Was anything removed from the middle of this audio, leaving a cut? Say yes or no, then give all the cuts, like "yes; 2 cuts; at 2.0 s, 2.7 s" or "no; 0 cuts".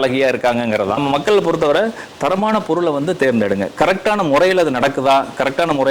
yes; 1 cut; at 1.0 s